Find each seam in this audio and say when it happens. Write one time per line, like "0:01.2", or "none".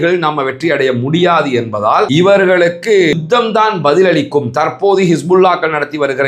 0:02.1